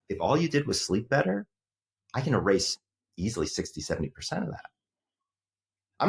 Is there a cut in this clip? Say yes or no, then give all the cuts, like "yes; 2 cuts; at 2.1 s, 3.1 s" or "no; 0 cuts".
no; 0 cuts